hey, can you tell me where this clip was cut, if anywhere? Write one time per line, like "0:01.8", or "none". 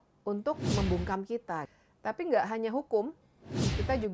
0:01.8